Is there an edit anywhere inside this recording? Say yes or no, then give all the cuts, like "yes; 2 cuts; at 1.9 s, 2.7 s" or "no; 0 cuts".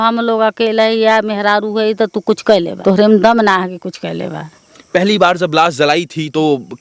yes; 2 cuts; at 2.7 s, 4.8 s